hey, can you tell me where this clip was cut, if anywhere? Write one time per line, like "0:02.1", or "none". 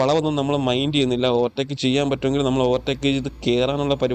none